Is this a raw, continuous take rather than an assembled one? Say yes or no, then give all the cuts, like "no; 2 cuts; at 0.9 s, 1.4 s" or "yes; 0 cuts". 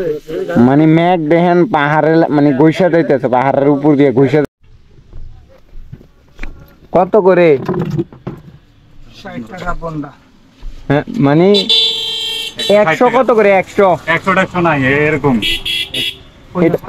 no; 1 cut; at 4.4 s